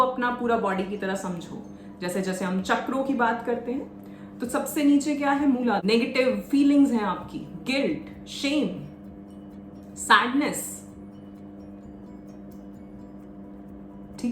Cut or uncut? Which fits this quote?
cut